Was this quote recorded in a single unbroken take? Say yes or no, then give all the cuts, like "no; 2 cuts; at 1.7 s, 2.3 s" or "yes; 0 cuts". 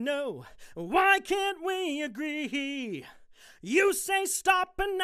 no; 1 cut; at 2.5 s